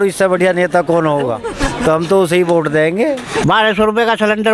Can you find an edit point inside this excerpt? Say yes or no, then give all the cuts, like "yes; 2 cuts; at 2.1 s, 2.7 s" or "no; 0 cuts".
yes; 2 cuts; at 1.5 s, 3.4 s